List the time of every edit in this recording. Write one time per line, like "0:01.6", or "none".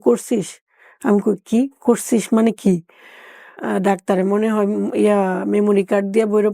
0:03.6